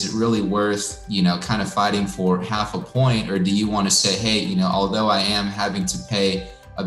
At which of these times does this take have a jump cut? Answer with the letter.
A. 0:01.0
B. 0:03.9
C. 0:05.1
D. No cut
A